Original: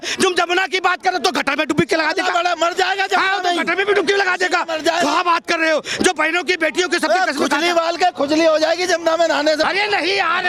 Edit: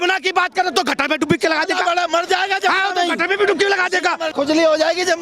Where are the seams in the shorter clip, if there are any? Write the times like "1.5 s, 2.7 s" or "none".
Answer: 4.3 s